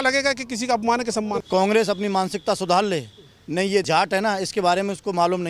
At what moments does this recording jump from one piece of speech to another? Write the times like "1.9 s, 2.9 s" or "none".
1.4 s, 3.9 s